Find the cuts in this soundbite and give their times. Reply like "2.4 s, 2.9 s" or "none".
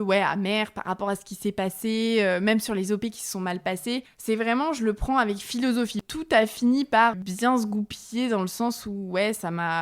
4.1 s, 6.0 s, 7.1 s